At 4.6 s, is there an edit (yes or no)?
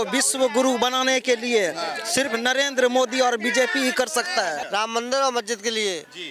yes